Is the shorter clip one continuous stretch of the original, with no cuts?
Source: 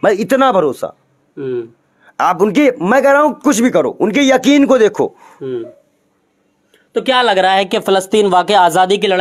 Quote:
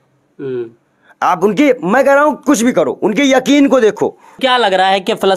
no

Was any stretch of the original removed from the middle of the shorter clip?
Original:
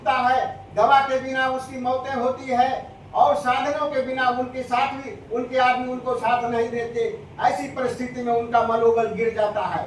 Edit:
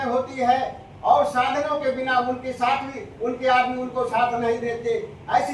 no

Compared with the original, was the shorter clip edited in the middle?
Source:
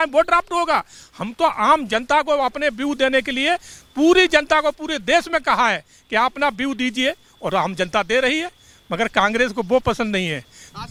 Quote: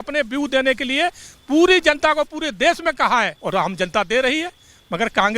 yes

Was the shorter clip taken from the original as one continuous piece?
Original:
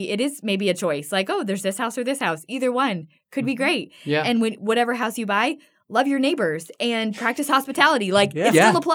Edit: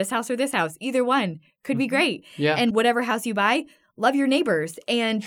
no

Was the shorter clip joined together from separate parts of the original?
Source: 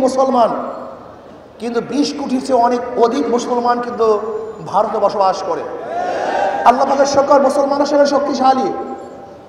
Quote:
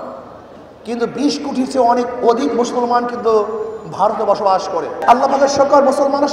yes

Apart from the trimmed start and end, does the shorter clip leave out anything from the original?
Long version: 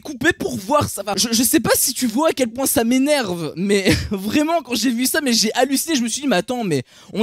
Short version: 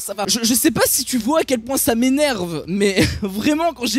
no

